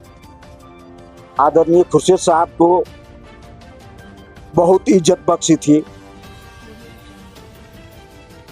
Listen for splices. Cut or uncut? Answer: cut